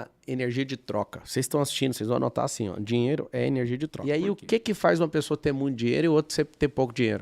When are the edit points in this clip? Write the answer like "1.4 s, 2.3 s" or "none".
3.9 s